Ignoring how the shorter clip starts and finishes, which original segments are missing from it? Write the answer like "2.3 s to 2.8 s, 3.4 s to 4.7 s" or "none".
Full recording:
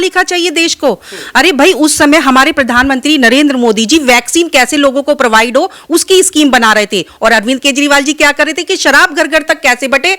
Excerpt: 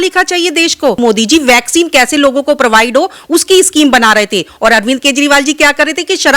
1.0 s to 3.6 s